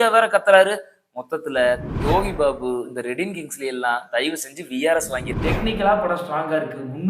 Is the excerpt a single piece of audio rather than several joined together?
no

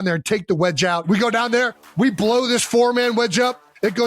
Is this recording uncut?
no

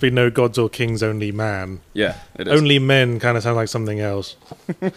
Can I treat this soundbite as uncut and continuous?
yes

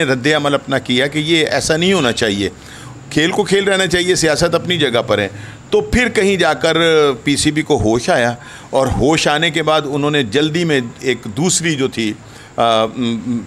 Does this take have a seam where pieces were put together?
no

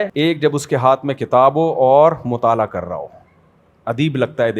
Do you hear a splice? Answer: no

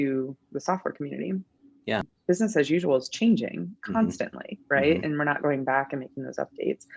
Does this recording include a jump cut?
yes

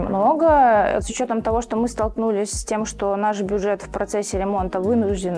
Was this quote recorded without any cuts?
no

